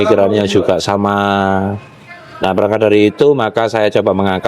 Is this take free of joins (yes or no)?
yes